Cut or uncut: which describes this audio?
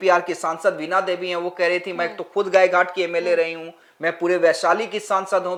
uncut